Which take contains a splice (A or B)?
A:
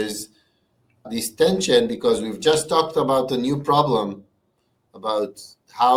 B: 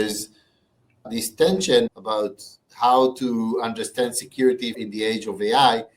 B